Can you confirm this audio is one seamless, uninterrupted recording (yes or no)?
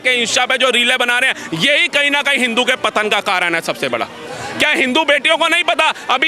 yes